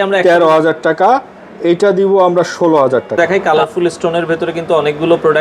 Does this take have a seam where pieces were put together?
yes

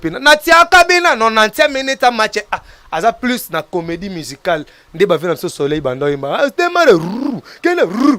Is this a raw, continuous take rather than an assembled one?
yes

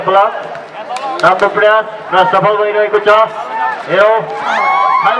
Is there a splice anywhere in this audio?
no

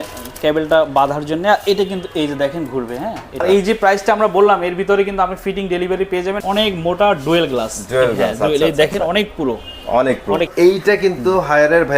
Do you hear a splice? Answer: yes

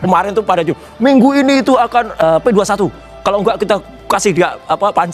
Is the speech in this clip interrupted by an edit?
yes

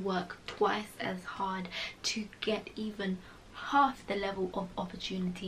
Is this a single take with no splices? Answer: yes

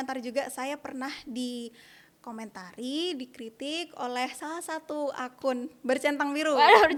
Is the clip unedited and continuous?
yes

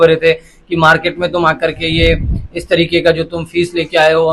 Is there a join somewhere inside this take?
no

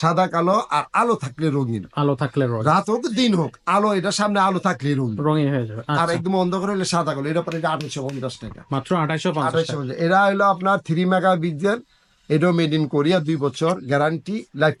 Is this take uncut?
yes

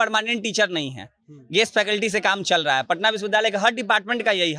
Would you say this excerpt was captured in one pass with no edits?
yes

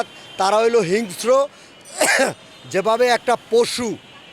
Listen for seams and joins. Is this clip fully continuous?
yes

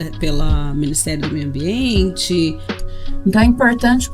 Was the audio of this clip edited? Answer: yes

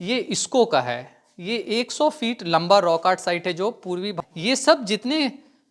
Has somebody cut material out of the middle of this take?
yes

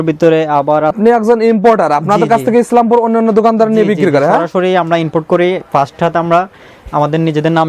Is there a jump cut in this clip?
yes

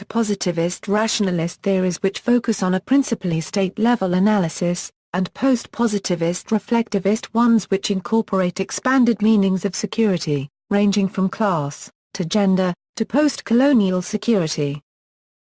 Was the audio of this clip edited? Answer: yes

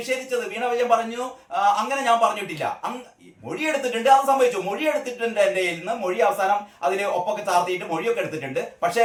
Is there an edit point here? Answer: no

